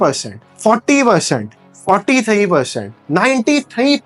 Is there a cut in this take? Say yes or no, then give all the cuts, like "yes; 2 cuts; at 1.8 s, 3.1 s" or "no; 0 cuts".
no; 0 cuts